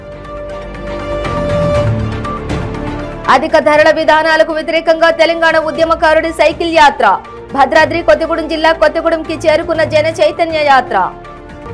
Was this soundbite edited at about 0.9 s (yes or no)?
yes